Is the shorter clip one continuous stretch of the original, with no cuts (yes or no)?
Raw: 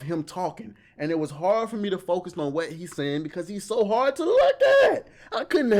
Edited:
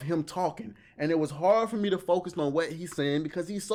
yes